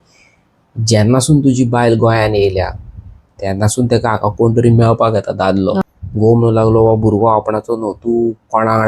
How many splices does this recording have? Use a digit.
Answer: 1